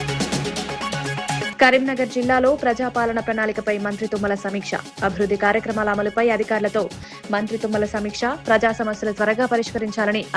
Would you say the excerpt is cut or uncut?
uncut